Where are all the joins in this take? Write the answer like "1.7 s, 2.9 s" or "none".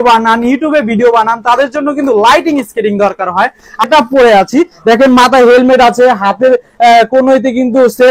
3.8 s